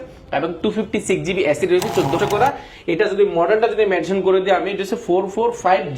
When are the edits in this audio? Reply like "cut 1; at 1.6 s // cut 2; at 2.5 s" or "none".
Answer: cut 1; at 2.2 s